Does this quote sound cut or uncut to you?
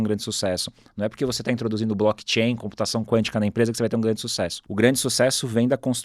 cut